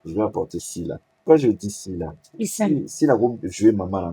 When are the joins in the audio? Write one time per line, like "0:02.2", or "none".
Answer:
0:01.2